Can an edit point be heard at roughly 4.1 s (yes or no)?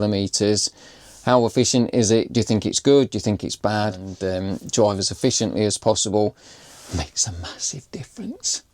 yes